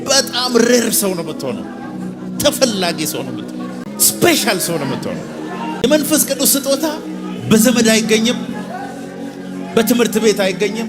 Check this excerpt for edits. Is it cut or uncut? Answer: cut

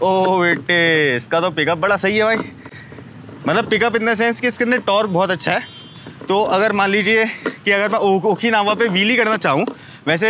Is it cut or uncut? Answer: uncut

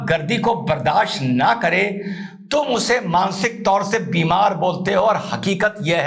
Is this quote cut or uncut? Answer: uncut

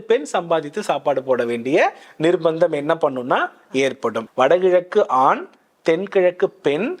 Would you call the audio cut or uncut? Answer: cut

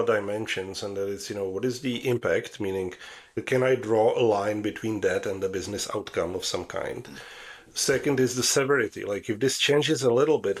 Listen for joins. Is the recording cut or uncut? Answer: cut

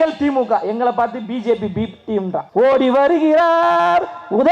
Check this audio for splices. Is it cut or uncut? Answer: cut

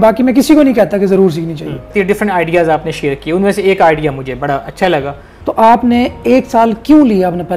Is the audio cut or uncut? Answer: cut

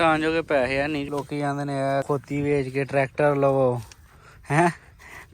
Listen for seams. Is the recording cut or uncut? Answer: cut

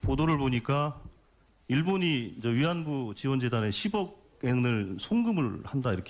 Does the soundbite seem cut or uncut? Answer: cut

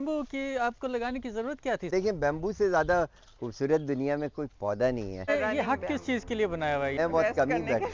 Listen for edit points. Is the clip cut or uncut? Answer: cut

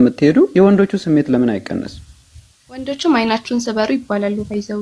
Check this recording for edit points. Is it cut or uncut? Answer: uncut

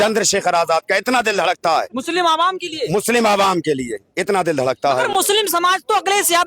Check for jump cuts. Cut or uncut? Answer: uncut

